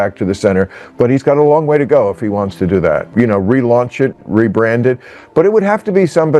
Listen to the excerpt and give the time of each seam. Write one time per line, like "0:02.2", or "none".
0:03.1